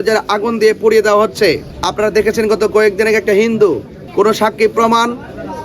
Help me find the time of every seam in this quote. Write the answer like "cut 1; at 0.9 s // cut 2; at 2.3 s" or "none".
cut 1; at 1.8 s // cut 2; at 4.0 s